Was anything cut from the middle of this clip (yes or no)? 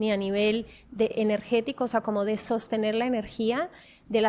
yes